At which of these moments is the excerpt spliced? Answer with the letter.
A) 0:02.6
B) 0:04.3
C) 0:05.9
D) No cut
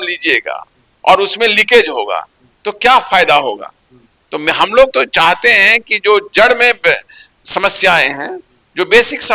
D